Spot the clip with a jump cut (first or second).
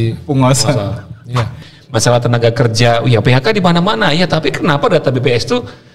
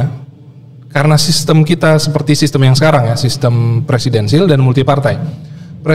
first